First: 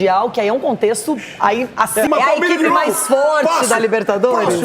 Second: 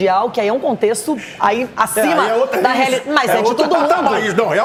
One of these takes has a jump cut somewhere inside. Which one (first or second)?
first